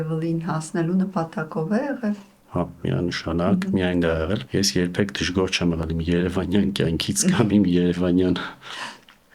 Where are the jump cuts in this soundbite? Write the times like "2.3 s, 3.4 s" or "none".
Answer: none

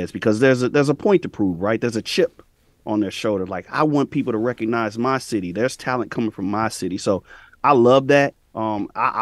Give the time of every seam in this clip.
none

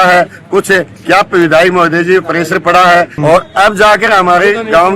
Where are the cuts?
3.1 s

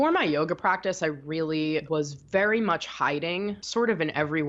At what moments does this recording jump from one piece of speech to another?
1.9 s, 3.6 s

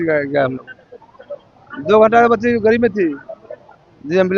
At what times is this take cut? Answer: none

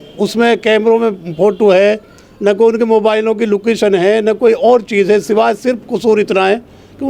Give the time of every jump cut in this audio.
none

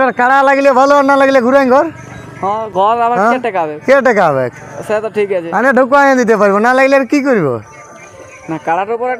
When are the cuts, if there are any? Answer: none

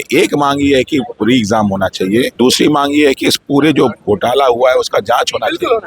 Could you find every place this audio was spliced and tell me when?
2.3 s

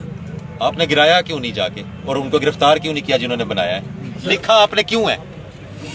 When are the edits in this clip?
4.2 s

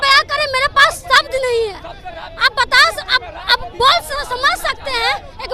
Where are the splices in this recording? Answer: none

